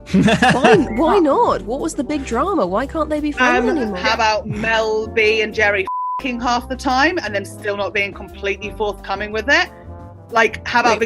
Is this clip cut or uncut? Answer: cut